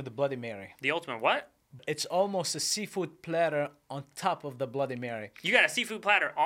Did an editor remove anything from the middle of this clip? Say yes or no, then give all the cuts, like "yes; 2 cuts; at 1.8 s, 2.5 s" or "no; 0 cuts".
yes; 1 cut; at 1.8 s